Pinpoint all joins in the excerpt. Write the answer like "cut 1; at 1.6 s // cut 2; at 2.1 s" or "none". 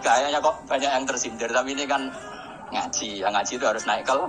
none